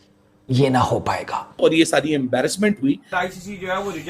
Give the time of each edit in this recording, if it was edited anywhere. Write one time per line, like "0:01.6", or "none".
0:01.5
0:03.1